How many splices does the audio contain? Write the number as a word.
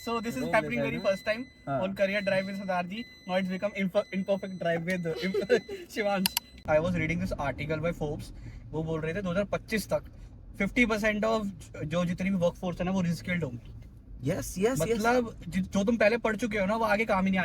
one